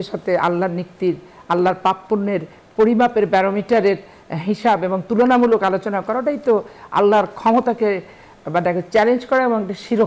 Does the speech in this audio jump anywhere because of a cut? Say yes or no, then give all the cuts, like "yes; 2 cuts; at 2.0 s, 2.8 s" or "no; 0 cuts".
no; 0 cuts